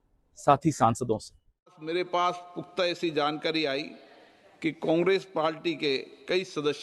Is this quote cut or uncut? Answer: cut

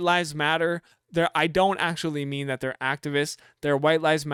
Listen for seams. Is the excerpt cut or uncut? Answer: uncut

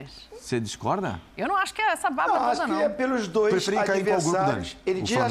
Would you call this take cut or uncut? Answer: uncut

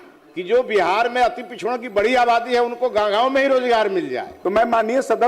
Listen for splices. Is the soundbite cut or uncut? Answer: cut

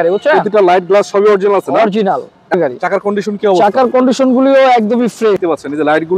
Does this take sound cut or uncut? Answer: cut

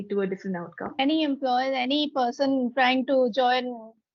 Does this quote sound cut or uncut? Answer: cut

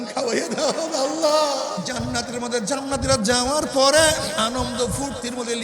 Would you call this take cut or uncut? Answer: cut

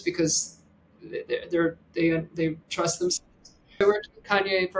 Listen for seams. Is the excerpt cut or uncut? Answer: cut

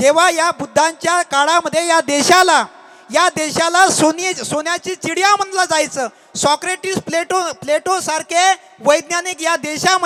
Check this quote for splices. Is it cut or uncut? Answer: uncut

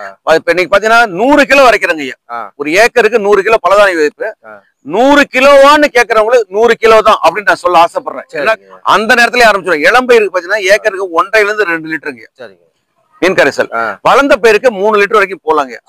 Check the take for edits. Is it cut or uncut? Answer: cut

